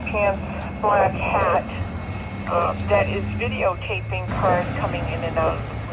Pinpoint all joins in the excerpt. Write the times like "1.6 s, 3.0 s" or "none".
none